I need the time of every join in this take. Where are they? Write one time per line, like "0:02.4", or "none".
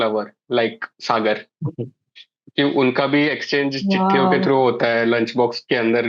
none